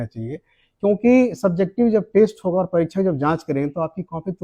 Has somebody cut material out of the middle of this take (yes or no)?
no